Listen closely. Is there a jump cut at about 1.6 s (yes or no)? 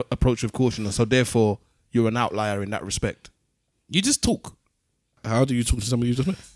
no